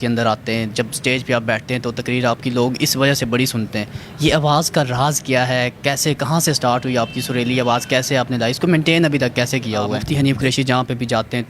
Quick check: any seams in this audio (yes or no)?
yes